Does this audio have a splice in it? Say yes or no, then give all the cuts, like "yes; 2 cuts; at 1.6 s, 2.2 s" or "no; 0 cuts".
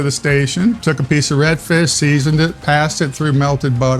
yes; 2 cuts; at 0.8 s, 2.6 s